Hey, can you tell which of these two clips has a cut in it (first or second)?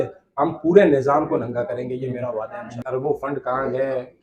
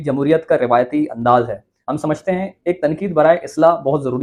first